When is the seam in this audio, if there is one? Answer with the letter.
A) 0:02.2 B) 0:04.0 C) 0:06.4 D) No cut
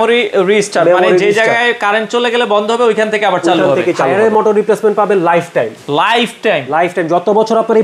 B